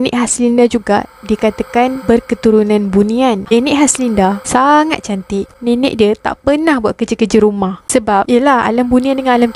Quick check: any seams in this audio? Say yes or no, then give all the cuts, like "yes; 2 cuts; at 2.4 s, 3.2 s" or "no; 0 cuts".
yes; 3 cuts; at 3.4 s, 5.5 s, 7.8 s